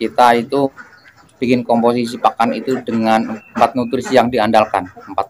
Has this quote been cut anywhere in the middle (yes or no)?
yes